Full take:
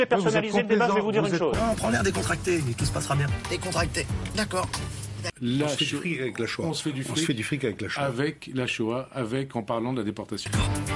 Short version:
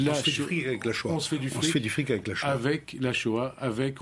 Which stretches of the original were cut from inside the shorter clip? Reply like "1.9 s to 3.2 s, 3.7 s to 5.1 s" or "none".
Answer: none